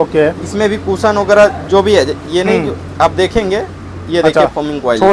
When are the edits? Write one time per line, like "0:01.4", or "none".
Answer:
none